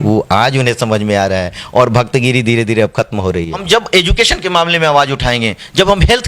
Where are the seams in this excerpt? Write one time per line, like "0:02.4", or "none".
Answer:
0:03.6